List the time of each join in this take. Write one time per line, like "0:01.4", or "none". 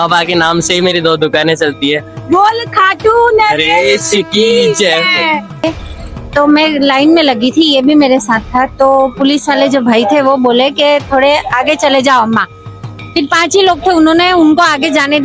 0:05.6

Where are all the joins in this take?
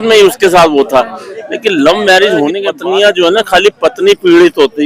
0:02.7

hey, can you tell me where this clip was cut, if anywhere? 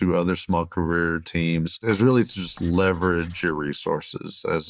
0:01.8

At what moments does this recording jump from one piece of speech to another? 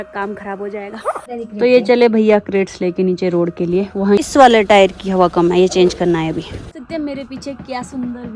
0:01.2
0:04.3
0:06.8

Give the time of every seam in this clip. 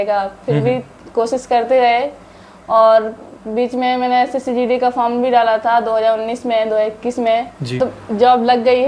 0:07.8

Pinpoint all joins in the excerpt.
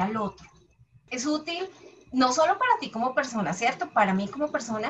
0:01.1

